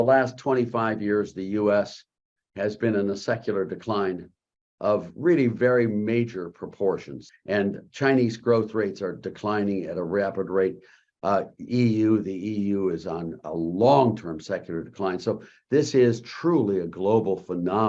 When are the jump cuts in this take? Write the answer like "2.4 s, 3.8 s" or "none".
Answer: 7.2 s